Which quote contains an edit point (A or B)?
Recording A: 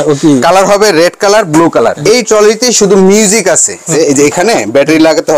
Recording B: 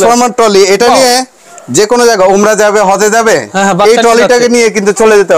A